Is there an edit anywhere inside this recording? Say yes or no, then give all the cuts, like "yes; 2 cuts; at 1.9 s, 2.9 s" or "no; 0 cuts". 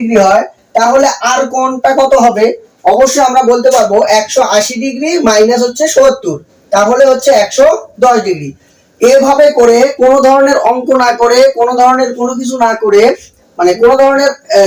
no; 0 cuts